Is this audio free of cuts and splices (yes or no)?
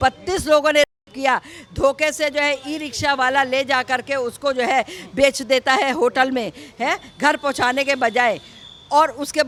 yes